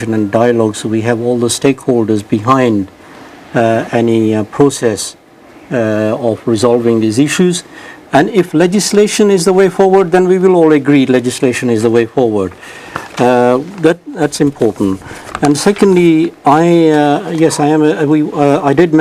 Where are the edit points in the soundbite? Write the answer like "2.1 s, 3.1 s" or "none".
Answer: 4.3 s